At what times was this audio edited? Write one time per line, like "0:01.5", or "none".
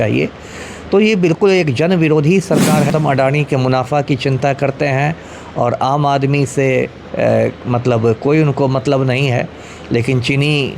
0:02.9